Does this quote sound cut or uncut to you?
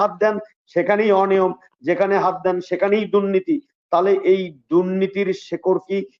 uncut